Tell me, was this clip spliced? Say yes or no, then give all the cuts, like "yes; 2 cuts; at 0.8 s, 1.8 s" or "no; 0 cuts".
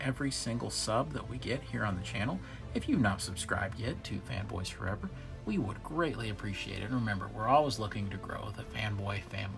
no; 0 cuts